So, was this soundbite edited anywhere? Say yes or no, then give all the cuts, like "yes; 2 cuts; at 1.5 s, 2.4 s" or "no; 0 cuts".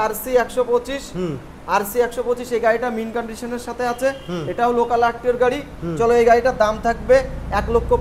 no; 0 cuts